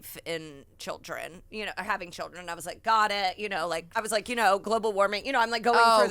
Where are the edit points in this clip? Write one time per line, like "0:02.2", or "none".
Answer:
0:04.0